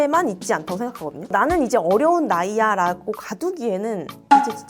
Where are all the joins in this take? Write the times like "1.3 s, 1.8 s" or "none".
1.2 s